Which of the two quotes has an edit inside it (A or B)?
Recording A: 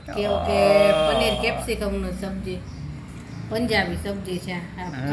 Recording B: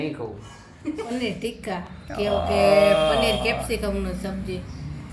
B